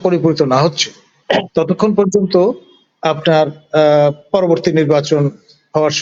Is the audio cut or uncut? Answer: uncut